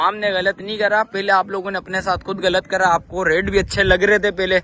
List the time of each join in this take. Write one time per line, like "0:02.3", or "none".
none